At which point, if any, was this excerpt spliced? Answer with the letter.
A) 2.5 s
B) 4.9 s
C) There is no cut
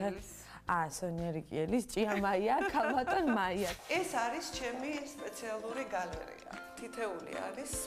A